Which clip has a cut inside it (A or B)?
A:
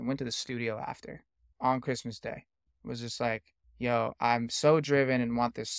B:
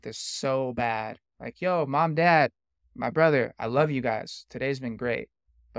A